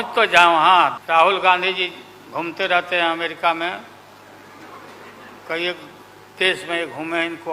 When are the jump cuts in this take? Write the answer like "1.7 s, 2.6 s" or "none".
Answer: 1.0 s